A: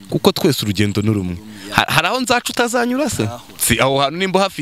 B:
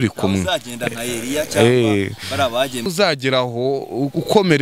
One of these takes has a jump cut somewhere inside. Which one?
B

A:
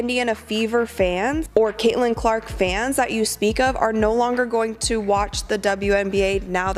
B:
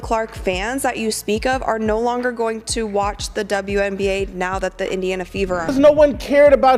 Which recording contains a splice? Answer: B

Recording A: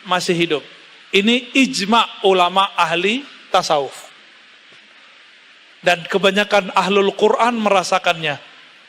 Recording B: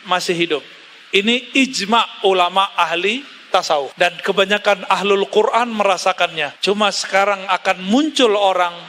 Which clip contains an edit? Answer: B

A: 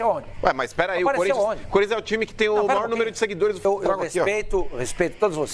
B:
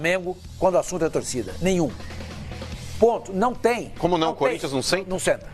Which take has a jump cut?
A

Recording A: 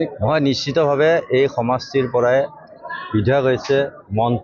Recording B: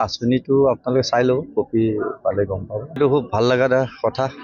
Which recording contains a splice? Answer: B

